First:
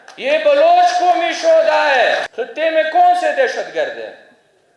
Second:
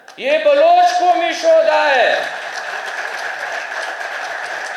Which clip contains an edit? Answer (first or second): first